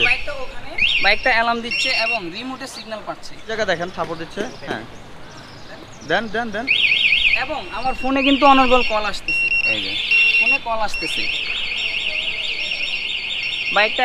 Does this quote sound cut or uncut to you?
uncut